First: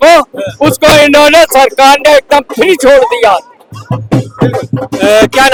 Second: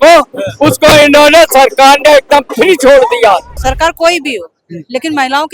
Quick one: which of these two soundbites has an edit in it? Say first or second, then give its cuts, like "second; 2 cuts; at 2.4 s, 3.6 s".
second; 1 cut; at 3.5 s